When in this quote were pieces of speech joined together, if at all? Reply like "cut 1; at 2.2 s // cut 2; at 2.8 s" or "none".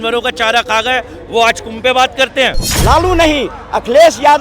cut 1; at 2.7 s